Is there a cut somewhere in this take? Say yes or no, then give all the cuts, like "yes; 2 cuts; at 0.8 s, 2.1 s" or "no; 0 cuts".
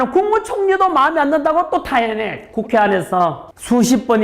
yes; 1 cut; at 2.4 s